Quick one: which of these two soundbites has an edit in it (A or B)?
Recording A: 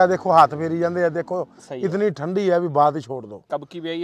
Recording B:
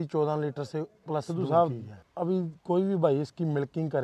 B